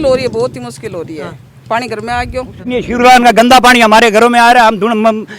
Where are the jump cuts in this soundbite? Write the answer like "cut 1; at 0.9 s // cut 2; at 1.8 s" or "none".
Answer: cut 1; at 2.7 s